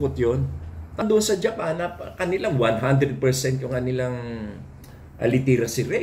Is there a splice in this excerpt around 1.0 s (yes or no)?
yes